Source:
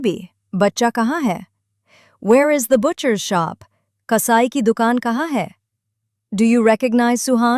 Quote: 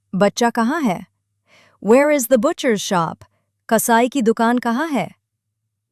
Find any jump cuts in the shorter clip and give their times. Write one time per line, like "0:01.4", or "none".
none